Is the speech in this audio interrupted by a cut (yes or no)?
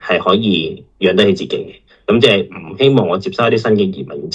no